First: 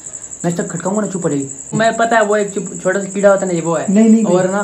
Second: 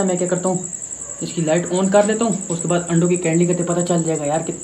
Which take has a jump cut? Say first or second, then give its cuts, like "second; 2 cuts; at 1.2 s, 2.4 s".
first; 1 cut; at 1.7 s